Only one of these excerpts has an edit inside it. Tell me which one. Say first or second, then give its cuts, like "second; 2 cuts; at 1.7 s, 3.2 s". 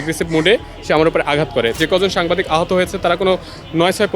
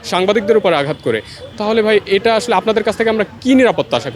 first; 1 cut; at 1.8 s